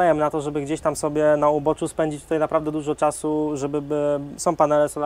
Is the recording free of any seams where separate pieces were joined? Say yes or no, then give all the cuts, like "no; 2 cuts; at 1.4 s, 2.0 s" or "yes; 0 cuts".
yes; 0 cuts